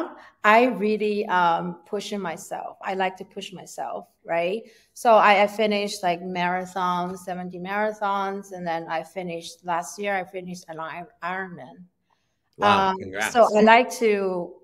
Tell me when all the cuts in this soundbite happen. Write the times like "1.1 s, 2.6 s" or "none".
none